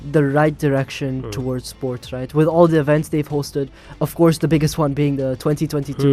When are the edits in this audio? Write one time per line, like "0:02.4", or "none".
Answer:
none